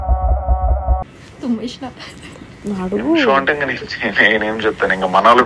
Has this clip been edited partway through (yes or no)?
no